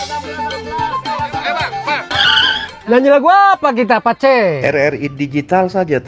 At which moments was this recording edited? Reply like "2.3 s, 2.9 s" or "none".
1.8 s